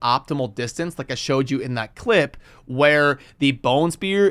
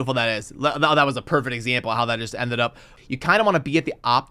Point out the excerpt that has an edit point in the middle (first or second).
second